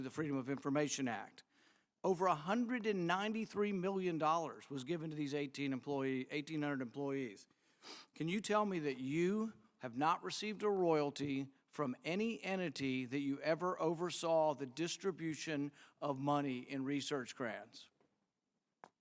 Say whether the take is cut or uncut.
uncut